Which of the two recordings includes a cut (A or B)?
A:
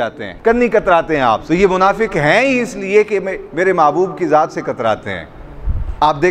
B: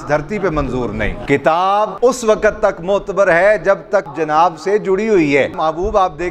B